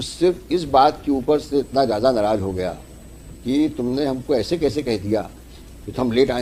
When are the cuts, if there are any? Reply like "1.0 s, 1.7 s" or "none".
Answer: none